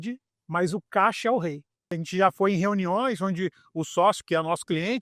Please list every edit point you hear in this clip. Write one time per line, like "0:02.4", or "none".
0:02.0